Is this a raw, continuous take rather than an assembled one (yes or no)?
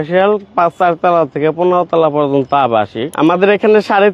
no